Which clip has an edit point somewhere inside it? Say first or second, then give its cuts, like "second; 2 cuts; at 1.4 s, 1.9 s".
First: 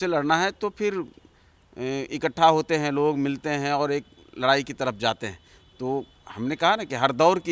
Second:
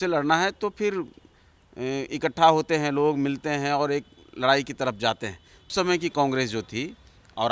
second; 1 cut; at 5.7 s